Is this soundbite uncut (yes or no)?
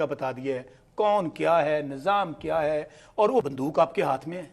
no